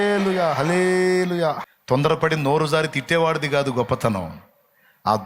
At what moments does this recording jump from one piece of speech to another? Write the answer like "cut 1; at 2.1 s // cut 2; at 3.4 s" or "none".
cut 1; at 1.7 s